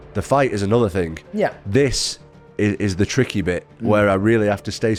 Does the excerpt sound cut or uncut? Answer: uncut